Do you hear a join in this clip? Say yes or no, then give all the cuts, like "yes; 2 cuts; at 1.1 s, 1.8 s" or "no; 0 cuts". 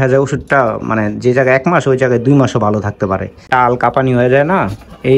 yes; 1 cut; at 3.4 s